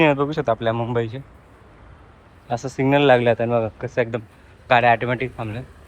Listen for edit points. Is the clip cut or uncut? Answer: uncut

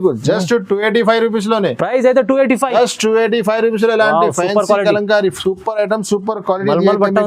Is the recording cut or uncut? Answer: uncut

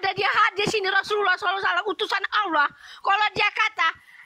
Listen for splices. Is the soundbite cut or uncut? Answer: uncut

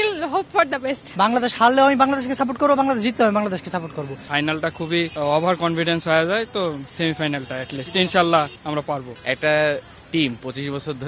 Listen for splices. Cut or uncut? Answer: cut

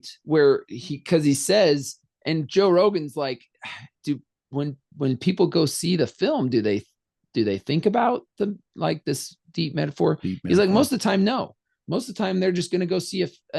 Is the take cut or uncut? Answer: uncut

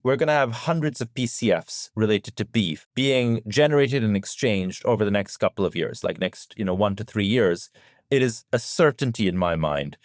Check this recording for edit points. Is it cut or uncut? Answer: cut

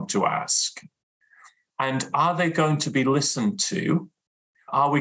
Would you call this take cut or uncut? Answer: uncut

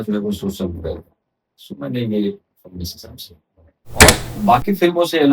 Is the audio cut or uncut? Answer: cut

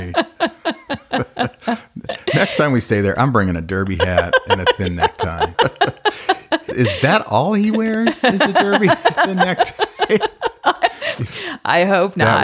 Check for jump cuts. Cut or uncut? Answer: cut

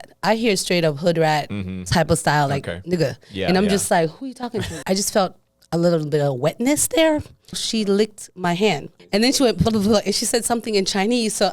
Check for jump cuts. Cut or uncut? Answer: cut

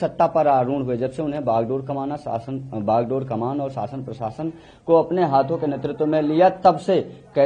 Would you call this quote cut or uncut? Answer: uncut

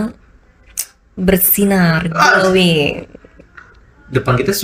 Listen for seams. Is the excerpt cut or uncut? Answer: uncut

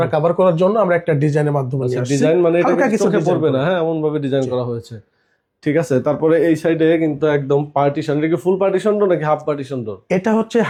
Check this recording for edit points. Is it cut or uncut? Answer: uncut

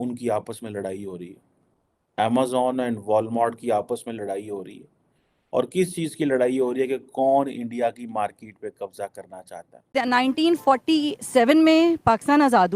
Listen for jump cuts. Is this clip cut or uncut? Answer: cut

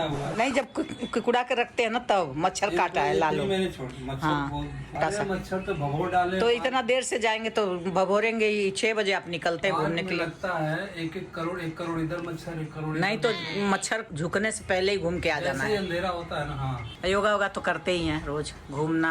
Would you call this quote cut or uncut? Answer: cut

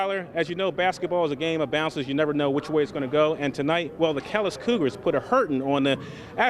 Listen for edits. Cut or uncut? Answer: uncut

